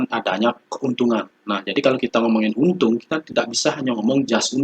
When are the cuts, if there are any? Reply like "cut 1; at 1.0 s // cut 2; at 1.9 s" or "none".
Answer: cut 1; at 1.4 s